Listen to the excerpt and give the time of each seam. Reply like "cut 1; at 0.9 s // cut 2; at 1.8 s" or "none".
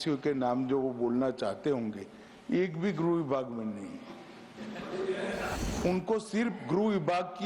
cut 1; at 5.6 s